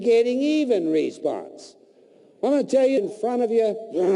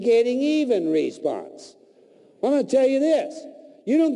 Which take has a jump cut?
first; 1 cut; at 3.0 s

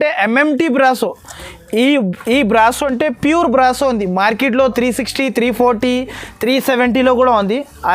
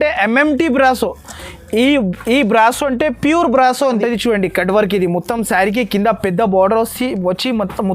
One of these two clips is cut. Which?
second; 1 cut; at 4.0 s

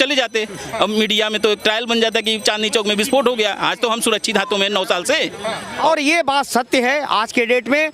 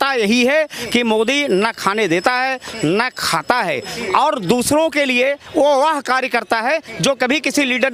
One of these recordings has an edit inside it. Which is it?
first; 1 cut; at 5.8 s

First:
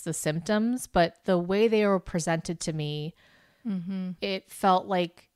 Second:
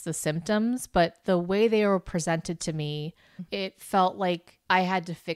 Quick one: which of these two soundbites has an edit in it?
second; 1 cut; at 3.4 s

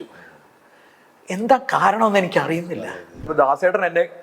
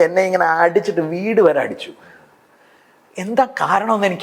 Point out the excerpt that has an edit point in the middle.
first; 1 cut; at 3.3 s

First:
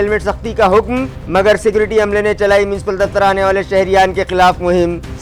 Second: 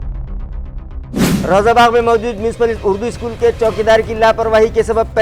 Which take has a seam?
second; 1 cut; at 1.4 s

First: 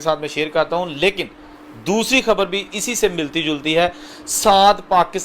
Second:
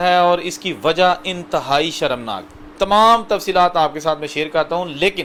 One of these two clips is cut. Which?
first; 1 cut; at 3.6 s

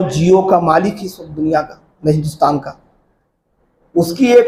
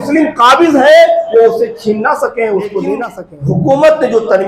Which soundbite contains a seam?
second; 1 cut; at 3.1 s

